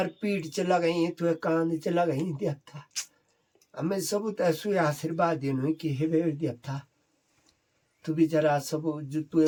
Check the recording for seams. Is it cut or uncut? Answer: uncut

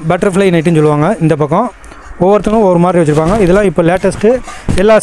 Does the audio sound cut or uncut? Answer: uncut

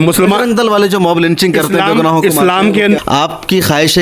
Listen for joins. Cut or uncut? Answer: cut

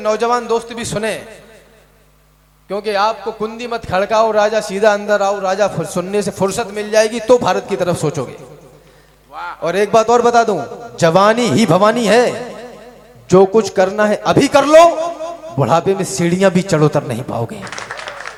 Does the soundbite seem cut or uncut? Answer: uncut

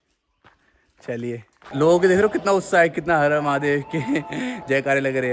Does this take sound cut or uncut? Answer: cut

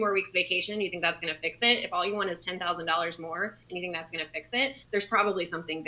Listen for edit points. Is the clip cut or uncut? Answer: cut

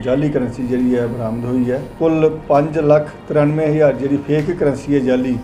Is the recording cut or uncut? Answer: cut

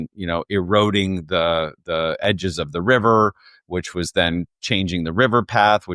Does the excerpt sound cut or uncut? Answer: uncut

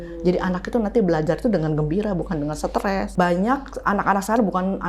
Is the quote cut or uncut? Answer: cut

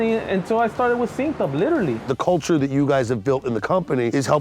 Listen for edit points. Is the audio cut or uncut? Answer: cut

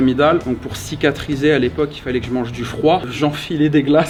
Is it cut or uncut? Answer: uncut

